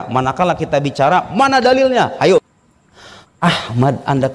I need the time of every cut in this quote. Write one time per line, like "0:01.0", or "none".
0:02.5